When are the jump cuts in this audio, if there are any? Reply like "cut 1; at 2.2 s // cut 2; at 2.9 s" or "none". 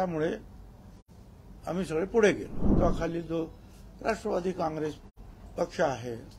cut 1; at 2.7 s